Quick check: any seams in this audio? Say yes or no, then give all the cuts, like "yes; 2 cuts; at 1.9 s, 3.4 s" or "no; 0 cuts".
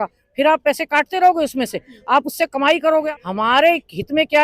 yes; 1 cut; at 3.1 s